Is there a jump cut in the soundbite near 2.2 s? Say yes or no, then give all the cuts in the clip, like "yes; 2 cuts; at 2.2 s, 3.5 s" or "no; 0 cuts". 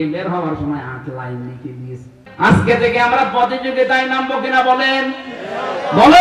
yes; 1 cut; at 2.2 s